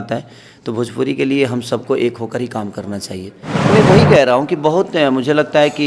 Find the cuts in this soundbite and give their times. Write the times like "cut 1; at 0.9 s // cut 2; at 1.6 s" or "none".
cut 1; at 3.4 s